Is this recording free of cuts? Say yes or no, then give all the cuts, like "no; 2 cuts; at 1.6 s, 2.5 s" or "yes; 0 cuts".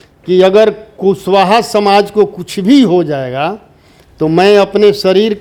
yes; 0 cuts